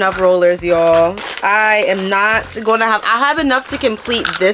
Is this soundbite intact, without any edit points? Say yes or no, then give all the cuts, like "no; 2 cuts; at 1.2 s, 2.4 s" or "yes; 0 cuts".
yes; 0 cuts